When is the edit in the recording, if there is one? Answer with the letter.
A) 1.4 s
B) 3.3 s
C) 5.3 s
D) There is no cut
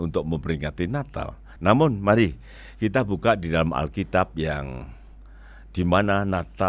A